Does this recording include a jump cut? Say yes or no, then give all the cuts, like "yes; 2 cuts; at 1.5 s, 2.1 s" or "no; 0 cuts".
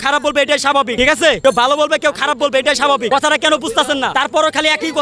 yes; 3 cuts; at 1.2 s, 3.0 s, 4.1 s